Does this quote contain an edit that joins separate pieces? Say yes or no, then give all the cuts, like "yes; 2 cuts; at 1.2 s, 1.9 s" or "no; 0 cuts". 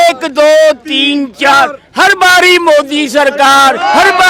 no; 0 cuts